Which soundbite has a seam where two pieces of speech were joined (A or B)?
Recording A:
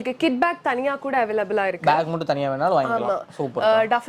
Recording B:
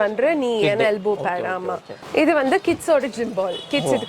B